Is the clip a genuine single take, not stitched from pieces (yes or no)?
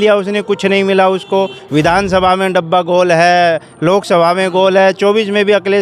yes